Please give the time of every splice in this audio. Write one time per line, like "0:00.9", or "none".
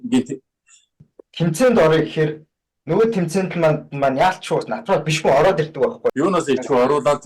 0:01.1
0:06.1

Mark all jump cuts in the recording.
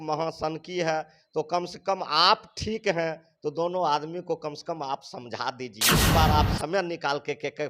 0:06.1

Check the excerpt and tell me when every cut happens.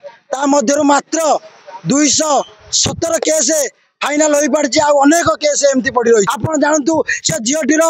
0:06.4

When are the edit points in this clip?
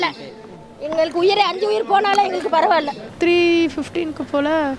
0:03.0

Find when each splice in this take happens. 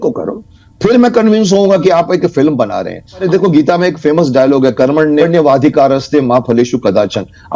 0:03.2
0:05.2

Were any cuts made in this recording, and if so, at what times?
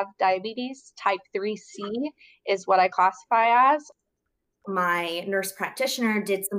0:04.6

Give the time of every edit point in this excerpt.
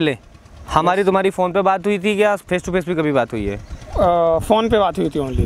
none

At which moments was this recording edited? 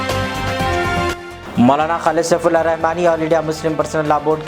0:01.3

